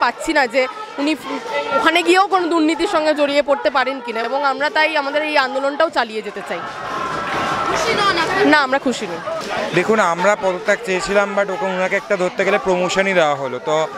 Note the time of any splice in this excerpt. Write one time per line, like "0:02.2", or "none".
none